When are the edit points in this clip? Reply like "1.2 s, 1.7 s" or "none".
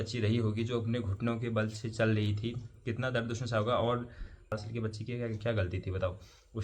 4.5 s